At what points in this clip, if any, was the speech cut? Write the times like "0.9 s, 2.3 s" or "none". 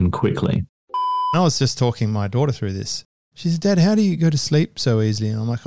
1.3 s, 4.2 s